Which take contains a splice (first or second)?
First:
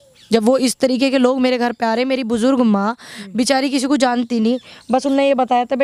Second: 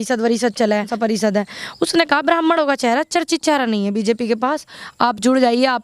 second